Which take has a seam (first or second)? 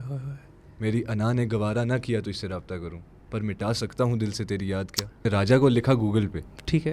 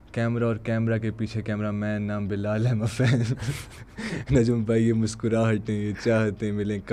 first